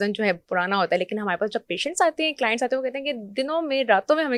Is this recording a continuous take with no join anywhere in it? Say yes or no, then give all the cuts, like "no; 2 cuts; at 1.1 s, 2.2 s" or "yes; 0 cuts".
yes; 0 cuts